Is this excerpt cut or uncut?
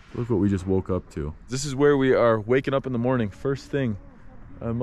cut